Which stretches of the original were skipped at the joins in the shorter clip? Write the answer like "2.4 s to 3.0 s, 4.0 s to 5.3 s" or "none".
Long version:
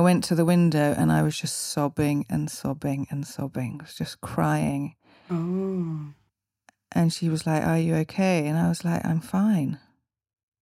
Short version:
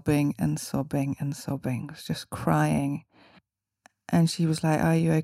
5.1 s to 6.0 s